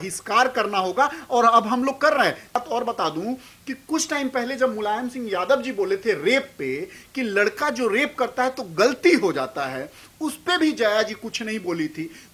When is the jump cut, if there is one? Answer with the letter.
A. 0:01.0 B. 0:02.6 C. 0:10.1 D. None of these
B